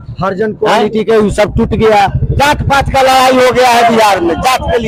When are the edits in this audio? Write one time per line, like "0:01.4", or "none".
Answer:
none